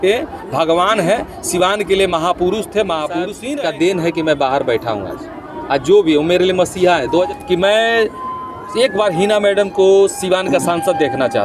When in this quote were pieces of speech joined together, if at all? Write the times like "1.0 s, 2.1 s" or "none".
3.4 s, 7.3 s